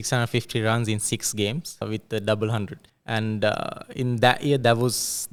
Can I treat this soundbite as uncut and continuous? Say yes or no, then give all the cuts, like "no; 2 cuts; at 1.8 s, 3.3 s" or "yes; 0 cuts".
yes; 0 cuts